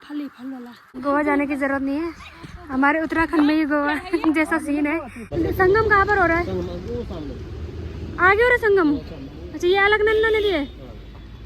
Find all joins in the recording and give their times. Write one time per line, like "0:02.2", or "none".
0:00.9
0:05.2